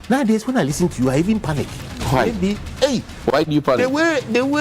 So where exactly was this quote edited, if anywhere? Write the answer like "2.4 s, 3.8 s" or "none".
none